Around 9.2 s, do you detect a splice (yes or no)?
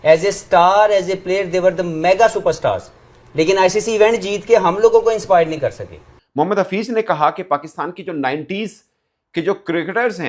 no